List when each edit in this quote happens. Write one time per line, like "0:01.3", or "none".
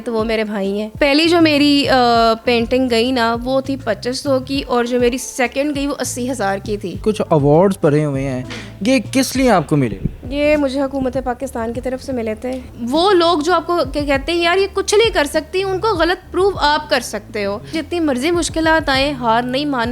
0:00.9
0:07.0
0:12.7
0:17.7